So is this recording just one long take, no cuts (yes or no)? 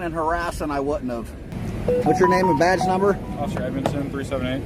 no